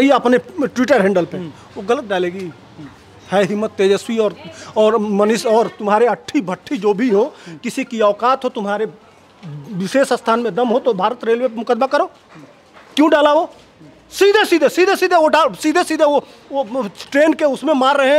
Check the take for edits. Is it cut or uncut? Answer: uncut